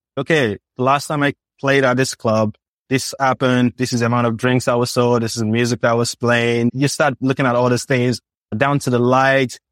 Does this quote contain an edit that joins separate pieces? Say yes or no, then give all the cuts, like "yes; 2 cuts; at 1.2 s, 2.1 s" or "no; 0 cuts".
no; 0 cuts